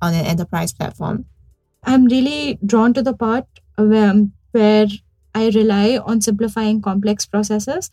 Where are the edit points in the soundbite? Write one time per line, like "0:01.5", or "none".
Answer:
0:01.8